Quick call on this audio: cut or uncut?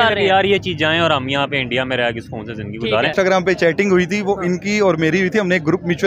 cut